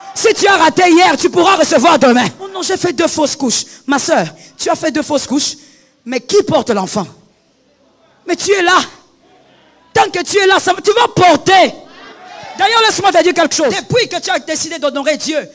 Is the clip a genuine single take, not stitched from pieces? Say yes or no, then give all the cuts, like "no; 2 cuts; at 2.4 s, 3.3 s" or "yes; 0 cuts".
no; 2 cuts; at 2.5 s, 13.8 s